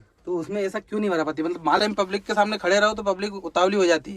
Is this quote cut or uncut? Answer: cut